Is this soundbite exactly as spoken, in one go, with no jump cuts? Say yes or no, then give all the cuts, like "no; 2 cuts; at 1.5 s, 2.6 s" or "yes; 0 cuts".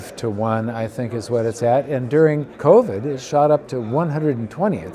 no; 1 cut; at 2.5 s